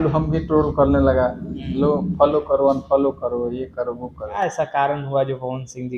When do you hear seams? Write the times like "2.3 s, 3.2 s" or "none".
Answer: 4.3 s